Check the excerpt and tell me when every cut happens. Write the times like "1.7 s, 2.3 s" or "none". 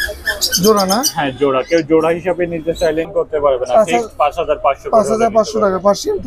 3.1 s